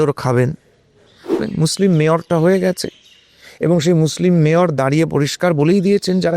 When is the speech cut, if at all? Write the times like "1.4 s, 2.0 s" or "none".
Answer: 1.4 s